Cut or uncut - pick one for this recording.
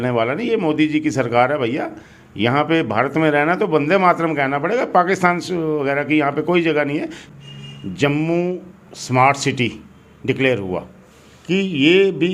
cut